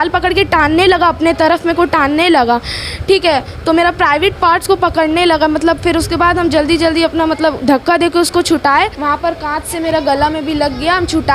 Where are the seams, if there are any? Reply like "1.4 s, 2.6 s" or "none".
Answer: 9.0 s